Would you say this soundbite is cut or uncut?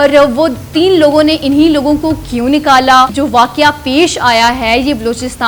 cut